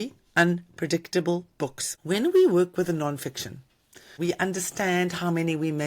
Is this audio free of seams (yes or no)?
no